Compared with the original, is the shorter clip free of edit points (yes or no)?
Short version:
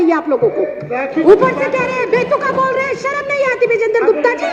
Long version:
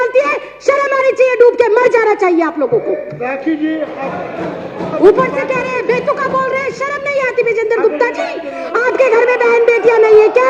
no